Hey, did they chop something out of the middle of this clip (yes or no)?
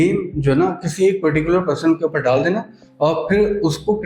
no